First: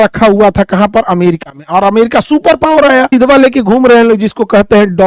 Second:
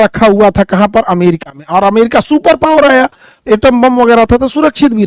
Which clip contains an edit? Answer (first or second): first